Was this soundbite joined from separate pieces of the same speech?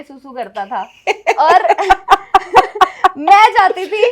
no; 0 cuts

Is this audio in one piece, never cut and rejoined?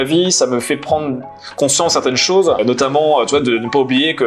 yes; 0 cuts

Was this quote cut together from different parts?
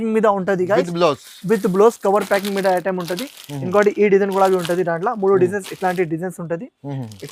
no; 0 cuts

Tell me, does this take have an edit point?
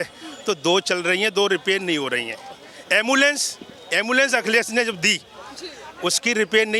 no; 0 cuts

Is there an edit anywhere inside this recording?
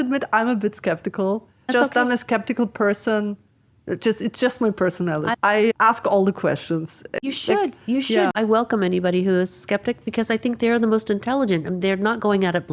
yes; 4 cuts; at 1.7 s, 5.3 s, 7.2 s, 8.3 s

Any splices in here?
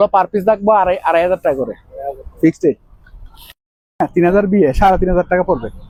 no; 0 cuts

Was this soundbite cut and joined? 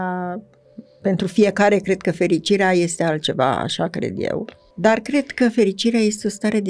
yes; 1 cut; at 4.6 s

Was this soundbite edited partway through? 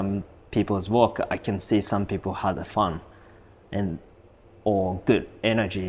no; 0 cuts

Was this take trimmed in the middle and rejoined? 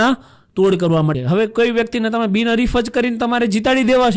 yes; 1 cut; at 1.2 s

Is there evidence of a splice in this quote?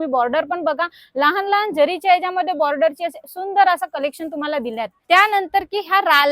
yes; 1 cut; at 4.9 s

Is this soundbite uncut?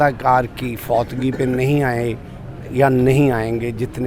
yes; 0 cuts

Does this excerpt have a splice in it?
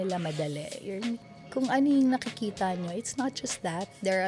yes; 1 cut; at 1.2 s

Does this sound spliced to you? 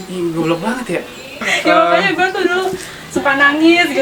yes; 1 cut; at 1.5 s

